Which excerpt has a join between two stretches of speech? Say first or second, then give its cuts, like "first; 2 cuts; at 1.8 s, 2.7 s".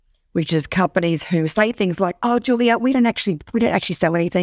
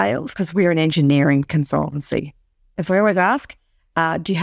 second; 1 cut; at 2.8 s